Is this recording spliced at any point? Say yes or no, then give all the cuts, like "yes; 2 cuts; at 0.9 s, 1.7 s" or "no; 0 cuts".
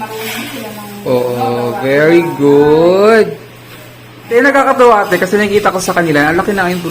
yes; 1 cut; at 4.2 s